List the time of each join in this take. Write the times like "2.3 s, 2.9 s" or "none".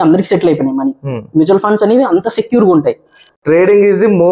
3.4 s